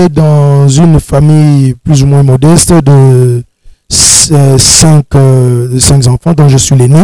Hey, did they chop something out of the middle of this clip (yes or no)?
no